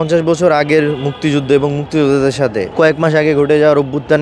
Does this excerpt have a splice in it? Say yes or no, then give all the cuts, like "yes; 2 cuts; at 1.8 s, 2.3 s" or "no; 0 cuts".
yes; 1 cut; at 2.6 s